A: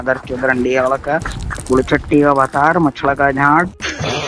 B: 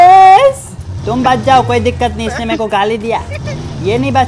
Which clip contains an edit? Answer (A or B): A